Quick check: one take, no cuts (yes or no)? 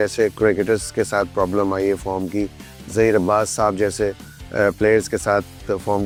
yes